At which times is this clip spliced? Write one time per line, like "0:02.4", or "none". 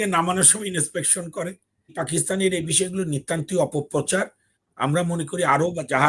0:01.9